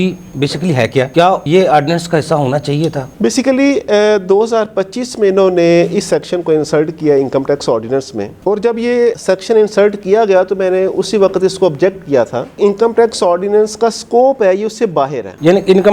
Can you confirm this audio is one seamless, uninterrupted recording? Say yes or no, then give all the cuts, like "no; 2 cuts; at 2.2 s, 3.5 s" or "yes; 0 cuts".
yes; 0 cuts